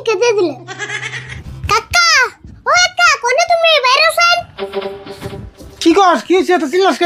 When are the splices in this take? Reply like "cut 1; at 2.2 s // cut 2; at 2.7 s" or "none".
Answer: cut 1; at 1.3 s